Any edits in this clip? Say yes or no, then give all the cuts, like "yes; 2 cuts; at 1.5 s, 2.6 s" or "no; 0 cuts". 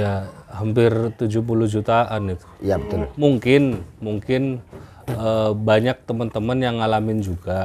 yes; 1 cut; at 3.1 s